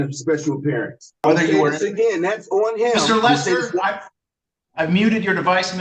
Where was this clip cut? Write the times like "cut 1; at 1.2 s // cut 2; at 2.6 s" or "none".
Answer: cut 1; at 1.2 s